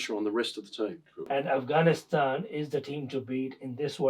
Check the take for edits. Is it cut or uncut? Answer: cut